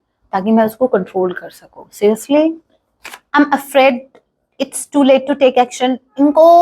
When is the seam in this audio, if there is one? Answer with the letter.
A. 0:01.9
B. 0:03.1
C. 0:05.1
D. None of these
B